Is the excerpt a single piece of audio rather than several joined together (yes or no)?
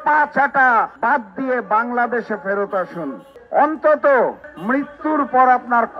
yes